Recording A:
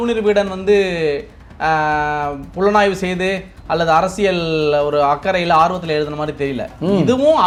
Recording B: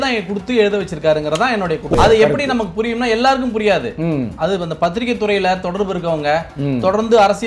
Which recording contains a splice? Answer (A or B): B